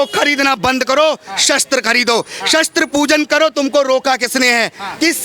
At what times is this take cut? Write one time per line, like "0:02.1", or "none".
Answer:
none